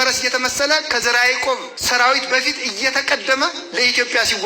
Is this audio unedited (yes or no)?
no